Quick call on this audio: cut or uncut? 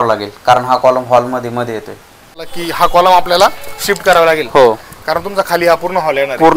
cut